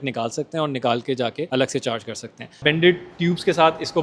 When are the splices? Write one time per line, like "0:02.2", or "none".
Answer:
0:01.5
0:02.6